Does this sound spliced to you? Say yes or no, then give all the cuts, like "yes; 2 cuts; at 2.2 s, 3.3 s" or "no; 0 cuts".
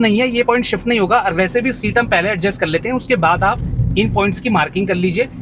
no; 0 cuts